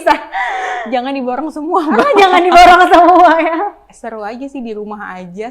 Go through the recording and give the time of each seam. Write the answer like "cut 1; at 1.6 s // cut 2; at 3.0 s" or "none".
cut 1; at 3.9 s